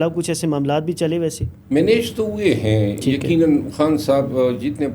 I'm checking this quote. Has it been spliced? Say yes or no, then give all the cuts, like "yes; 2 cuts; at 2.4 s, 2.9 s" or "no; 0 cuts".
yes; 1 cut; at 1.5 s